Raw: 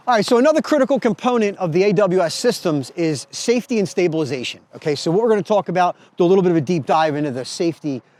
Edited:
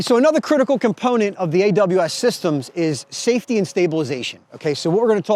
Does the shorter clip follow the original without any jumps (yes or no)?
yes